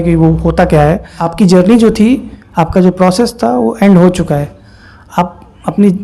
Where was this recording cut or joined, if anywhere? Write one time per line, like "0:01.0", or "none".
0:01.2